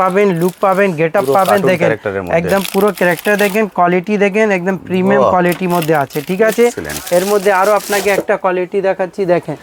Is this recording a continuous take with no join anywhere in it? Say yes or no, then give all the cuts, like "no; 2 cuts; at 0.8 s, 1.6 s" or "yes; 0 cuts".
yes; 0 cuts